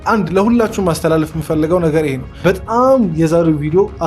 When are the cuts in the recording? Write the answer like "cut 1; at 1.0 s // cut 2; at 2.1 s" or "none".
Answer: cut 1; at 2.3 s